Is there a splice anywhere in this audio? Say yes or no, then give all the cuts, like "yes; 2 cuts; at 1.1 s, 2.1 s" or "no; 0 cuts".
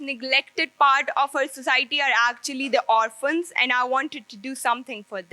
no; 0 cuts